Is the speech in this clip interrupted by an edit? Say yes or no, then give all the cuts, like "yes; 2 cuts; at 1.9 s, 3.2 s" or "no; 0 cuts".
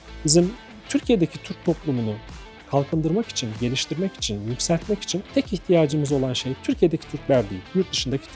no; 0 cuts